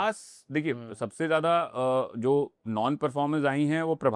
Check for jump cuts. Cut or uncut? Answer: uncut